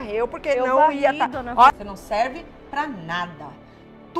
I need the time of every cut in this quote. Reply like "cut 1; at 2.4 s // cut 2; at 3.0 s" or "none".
cut 1; at 1.7 s